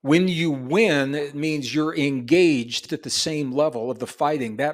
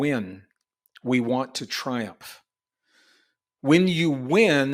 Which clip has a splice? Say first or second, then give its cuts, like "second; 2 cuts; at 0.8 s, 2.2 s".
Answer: first; 1 cut; at 2.8 s